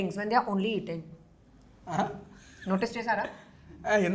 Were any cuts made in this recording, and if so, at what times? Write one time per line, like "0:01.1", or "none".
none